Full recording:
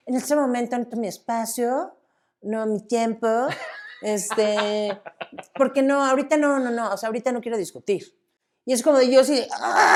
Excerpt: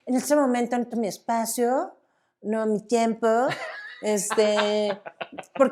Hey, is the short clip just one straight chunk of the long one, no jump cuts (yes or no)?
yes